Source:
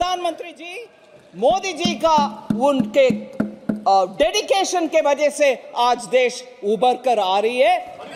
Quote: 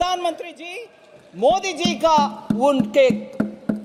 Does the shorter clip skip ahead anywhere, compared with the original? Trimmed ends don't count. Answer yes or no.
no